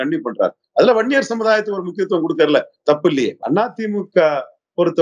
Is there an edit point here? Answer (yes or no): yes